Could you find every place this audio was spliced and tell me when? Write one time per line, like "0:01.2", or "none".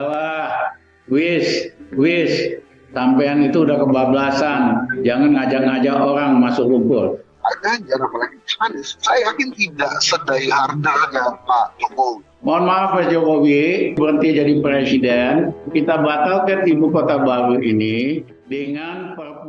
none